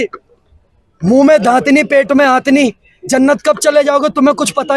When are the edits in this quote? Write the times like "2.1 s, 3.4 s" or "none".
none